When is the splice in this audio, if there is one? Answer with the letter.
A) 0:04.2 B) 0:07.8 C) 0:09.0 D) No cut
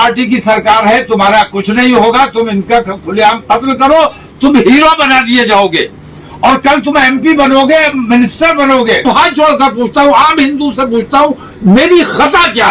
C